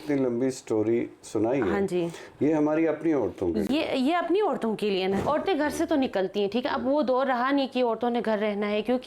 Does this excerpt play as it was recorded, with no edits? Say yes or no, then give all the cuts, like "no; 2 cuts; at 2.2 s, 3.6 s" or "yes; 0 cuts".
no; 1 cut; at 5.2 s